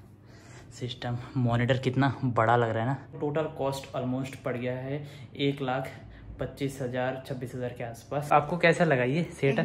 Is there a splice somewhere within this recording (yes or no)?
yes